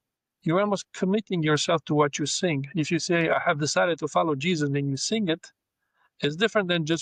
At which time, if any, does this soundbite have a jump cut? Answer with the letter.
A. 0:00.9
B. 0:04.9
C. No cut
C